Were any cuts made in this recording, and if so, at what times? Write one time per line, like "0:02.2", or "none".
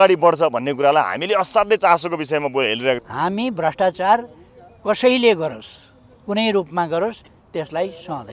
0:03.0